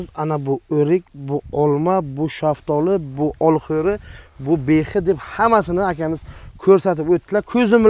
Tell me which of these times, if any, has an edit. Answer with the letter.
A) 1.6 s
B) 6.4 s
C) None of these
C